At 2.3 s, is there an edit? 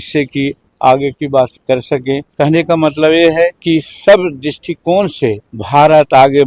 yes; 3 cuts; at 2.3 s, 3.6 s, 5.5 s

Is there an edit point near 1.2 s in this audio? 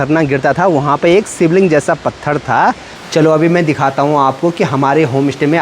no; 1 cut; at 3.0 s

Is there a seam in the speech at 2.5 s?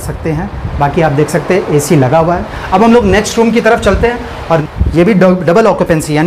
yes; 2 cuts; at 2.5 s, 4.6 s

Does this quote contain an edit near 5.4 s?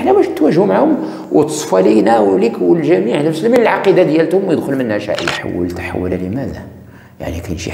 yes; 1 cut; at 5.4 s

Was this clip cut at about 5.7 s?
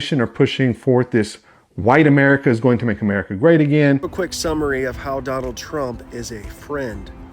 no; 1 cut; at 4.2 s

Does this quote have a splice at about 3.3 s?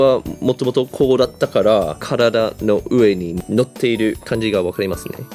yes; 4 cuts; at 0.9 s, 2.0 s, 3.3 s, 4.2 s

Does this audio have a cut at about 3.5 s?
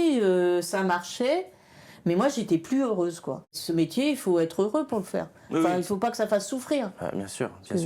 yes; 1 cut; at 3.5 s

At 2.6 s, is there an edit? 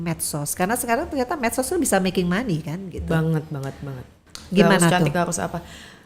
no; 1 cut; at 4.3 s

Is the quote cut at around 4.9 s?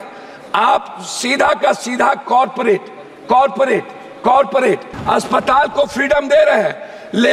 yes; 1 cut; at 4.9 s

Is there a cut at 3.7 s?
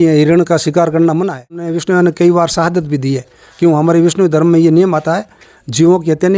no; 1 cut; at 1.8 s

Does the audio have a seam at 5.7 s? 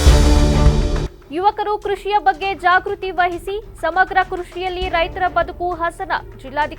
no; 1 cut; at 1.1 s

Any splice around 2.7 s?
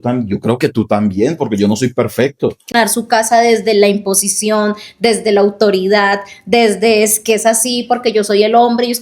yes; 1 cut; at 2.7 s

